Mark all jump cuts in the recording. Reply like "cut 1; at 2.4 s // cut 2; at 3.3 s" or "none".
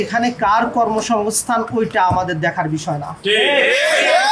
none